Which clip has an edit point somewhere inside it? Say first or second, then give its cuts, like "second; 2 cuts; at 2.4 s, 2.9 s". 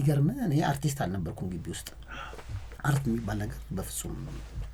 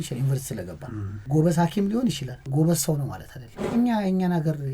second; 3 cuts; at 1.2 s, 2.3 s, 3.7 s